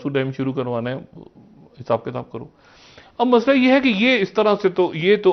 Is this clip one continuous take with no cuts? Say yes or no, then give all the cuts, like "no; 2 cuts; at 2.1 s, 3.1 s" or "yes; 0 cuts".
yes; 0 cuts